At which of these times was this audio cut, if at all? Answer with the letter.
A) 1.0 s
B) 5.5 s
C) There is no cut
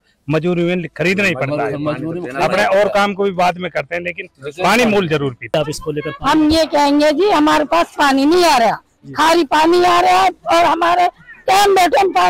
B